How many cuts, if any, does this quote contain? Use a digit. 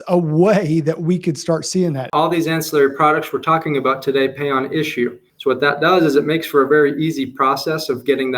2